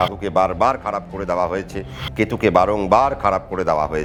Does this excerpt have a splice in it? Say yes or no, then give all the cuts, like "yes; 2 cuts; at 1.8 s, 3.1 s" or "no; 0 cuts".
no; 0 cuts